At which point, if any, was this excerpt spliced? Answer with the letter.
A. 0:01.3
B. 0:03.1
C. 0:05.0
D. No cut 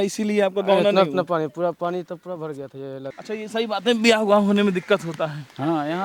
B